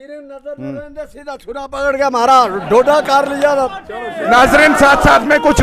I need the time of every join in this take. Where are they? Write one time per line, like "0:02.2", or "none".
0:03.7